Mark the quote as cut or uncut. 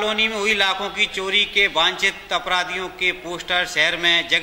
uncut